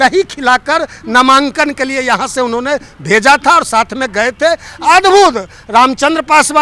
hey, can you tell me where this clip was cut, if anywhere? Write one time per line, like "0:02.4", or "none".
none